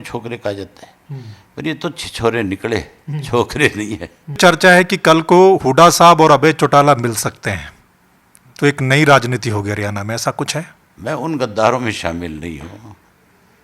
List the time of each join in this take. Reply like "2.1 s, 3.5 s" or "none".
4.4 s, 10.8 s

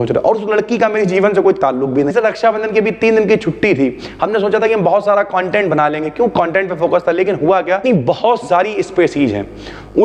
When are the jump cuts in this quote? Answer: 2.1 s, 7.8 s

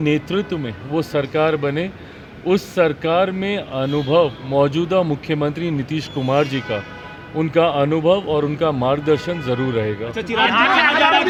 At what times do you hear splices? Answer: none

